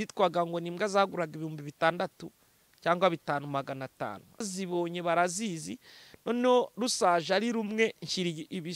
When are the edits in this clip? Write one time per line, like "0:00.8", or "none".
0:04.5